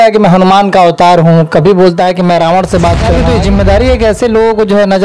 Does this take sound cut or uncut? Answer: cut